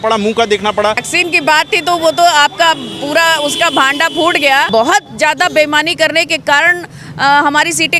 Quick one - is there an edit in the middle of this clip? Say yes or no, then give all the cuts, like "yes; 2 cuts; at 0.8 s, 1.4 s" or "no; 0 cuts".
yes; 2 cuts; at 1.1 s, 4.7 s